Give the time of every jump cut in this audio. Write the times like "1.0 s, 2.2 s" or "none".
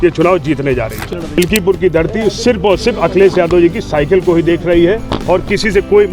1.0 s